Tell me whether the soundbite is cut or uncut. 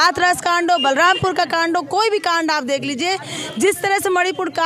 uncut